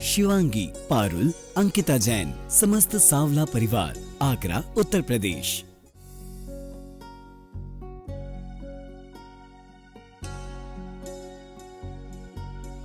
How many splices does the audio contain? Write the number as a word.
one